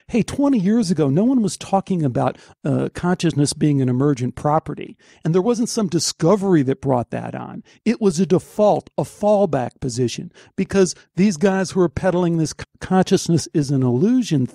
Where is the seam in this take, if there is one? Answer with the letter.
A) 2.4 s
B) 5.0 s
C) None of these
C